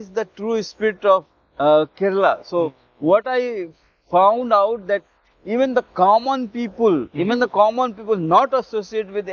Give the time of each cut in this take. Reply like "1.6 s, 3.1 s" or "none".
none